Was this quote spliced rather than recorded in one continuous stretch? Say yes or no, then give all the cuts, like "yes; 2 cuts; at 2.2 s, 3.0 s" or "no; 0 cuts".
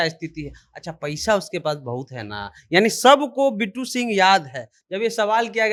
no; 0 cuts